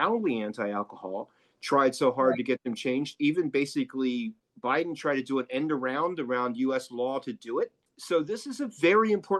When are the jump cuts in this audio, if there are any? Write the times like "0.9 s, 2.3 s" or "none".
none